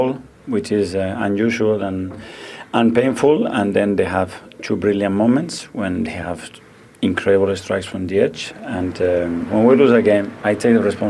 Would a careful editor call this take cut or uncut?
cut